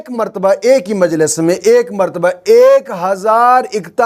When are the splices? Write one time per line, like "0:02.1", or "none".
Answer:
none